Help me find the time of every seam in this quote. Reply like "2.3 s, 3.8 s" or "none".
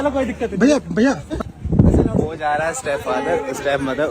1.5 s